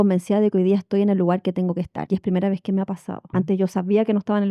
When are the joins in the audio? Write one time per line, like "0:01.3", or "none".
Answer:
0:02.0
0:03.1